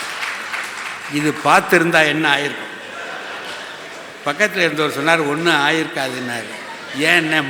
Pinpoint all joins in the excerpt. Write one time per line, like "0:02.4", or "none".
none